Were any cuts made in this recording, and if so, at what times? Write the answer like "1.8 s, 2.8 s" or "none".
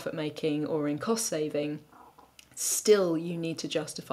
none